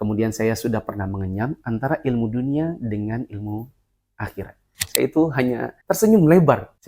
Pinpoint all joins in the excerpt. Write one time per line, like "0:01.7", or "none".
0:04.8